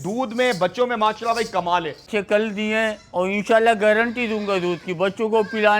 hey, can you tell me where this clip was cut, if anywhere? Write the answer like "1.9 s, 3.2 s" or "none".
2.1 s